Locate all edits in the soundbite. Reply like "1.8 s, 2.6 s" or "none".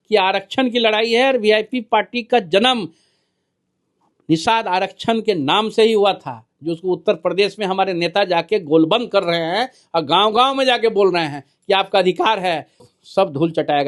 13.0 s